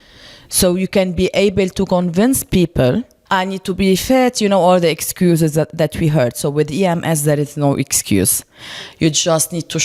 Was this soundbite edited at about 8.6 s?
no; 1 cut; at 3.2 s

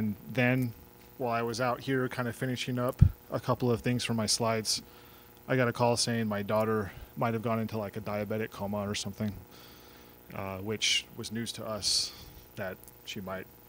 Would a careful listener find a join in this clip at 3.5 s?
no; 1 cut; at 1.6 s

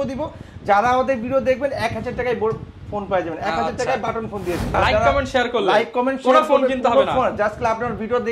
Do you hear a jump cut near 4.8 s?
yes; 1 cut; at 4.8 s

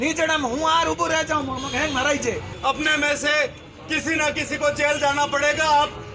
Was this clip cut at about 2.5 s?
yes; 1 cut; at 2.5 s

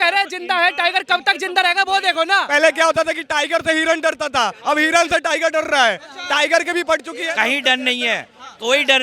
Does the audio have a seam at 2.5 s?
yes; 2 cuts; at 2.5 s, 7.1 s

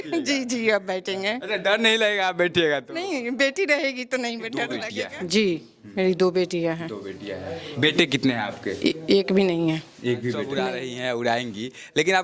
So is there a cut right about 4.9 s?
yes; 2 cuts; at 4.9 s, 10.7 s

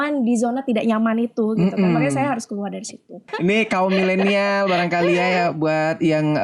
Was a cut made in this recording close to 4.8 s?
no; 1 cut; at 3.3 s

